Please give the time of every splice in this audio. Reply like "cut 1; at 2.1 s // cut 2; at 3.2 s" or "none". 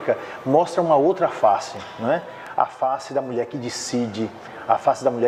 none